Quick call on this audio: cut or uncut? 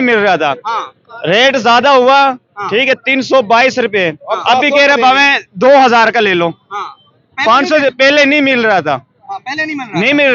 uncut